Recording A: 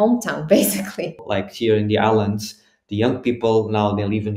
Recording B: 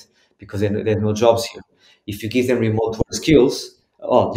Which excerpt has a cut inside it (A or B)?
A